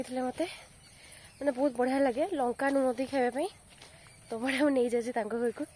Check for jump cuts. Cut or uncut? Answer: uncut